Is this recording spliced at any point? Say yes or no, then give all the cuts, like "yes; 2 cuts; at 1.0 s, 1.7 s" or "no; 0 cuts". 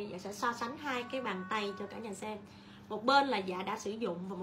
no; 0 cuts